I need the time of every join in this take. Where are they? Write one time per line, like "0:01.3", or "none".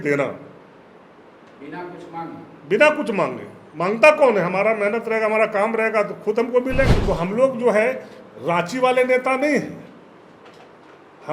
0:07.0